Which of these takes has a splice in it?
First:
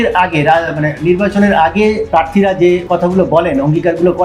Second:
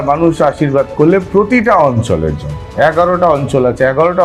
first; 2 cuts; at 2.0 s, 2.8 s

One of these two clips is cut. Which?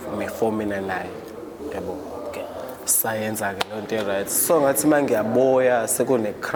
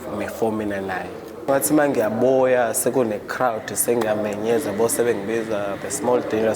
second; 1 cut; at 1.5 s

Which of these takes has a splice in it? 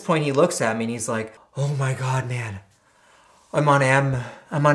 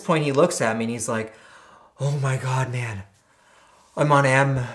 first; 1 cut; at 1.4 s

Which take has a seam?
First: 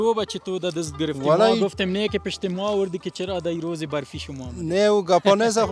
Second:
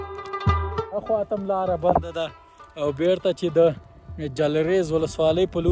second; 1 cut; at 0.9 s

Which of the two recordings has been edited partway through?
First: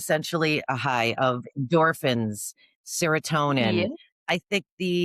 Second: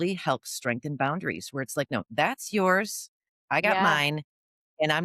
first; 1 cut; at 3.7 s

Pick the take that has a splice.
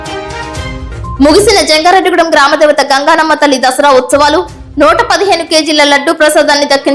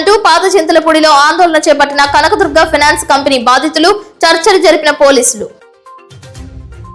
first; 1 cut; at 1.2 s

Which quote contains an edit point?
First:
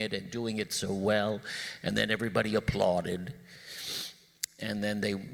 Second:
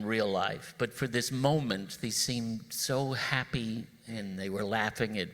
second; 1 cut; at 4.1 s

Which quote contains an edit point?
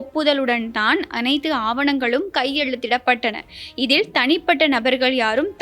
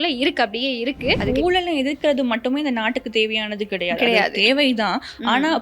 second; 1 cut; at 1.2 s

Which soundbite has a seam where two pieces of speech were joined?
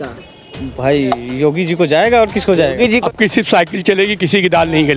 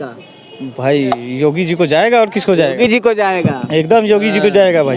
first; 1 cut; at 2.9 s

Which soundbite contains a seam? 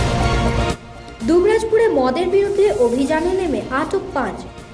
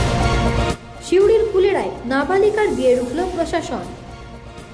first; 1 cut; at 1.1 s

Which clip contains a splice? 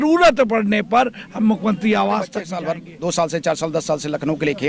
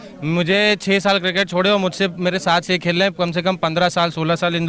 first; 1 cut; at 2.5 s

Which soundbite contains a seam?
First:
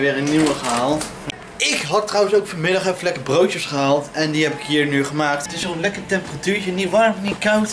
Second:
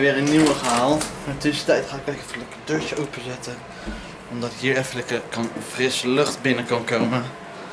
first; 2 cuts; at 1.2 s, 5.5 s

